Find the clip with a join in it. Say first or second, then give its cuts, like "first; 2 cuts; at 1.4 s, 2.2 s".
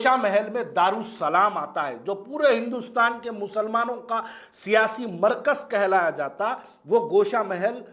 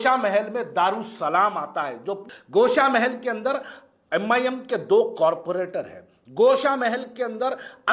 second; 1 cut; at 2.3 s